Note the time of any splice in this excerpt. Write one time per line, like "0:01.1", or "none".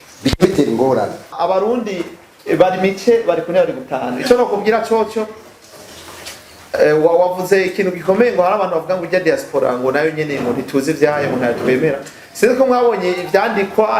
0:01.3